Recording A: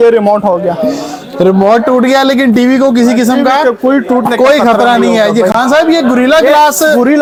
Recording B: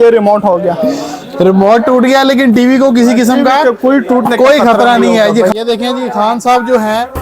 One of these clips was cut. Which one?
B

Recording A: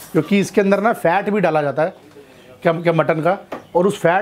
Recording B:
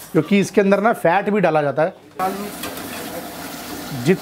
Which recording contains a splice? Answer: B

